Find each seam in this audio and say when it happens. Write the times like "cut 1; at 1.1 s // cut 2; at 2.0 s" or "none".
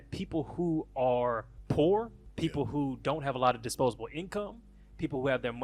cut 1; at 1.5 s // cut 2; at 2.2 s